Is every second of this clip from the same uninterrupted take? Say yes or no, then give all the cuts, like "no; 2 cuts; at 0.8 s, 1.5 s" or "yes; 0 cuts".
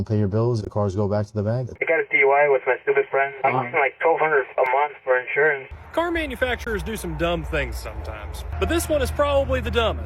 no; 2 cuts; at 1.8 s, 5.6 s